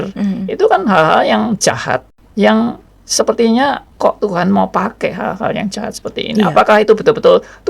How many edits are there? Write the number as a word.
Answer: one